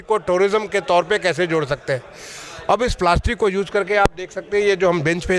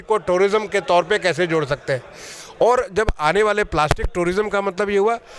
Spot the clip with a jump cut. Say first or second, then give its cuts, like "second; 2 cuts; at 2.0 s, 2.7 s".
second; 1 cut; at 2.4 s